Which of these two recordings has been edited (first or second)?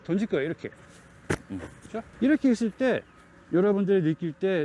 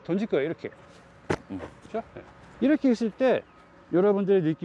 first